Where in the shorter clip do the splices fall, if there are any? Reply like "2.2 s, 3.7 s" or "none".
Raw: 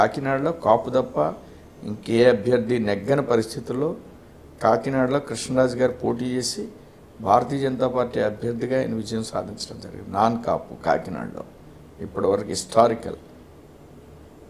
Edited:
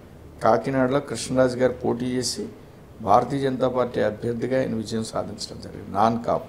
none